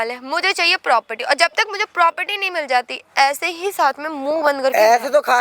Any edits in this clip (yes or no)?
no